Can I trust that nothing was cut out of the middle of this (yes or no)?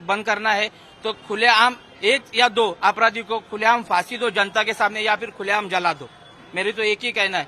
yes